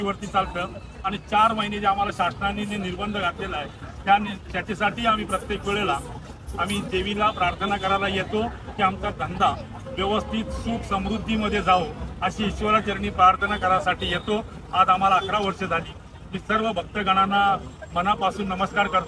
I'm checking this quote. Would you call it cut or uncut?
uncut